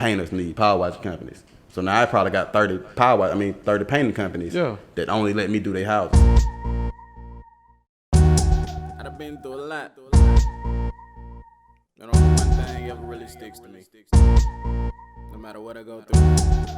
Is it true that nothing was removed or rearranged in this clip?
no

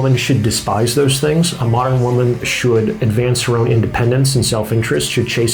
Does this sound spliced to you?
no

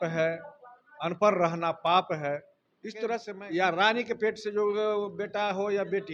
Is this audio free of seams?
no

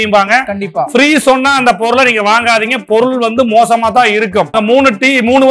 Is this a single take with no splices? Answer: no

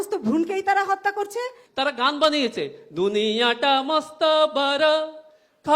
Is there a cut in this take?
yes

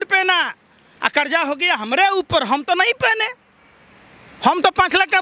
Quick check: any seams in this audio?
no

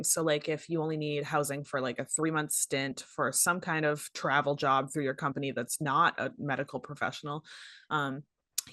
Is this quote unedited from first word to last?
yes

